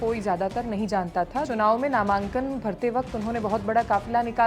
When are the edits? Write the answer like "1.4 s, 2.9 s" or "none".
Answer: 1.5 s

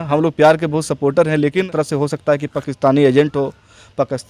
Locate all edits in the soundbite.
1.7 s

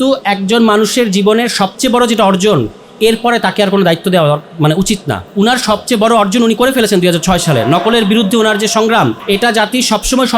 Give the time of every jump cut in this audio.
5.2 s, 9.2 s

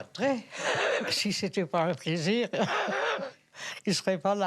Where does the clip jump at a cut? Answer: 1.1 s

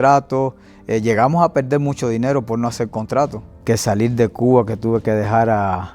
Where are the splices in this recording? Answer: 3.5 s

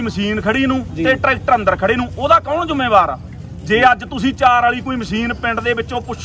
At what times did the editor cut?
none

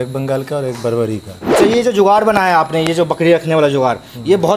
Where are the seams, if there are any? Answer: 1.4 s

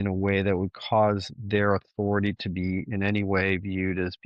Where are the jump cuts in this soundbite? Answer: none

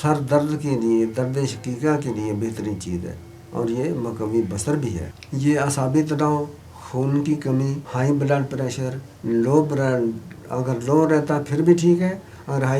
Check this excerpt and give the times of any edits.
5.1 s, 7.8 s

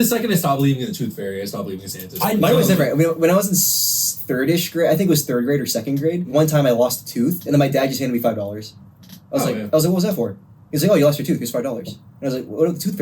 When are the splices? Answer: 6.3 s

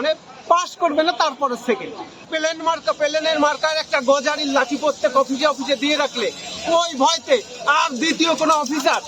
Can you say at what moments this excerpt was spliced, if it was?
2.2 s

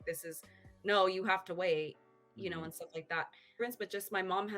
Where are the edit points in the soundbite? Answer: 3.6 s

